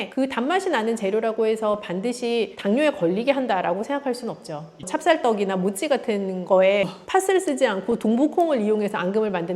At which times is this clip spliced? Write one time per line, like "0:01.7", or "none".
0:04.8
0:06.9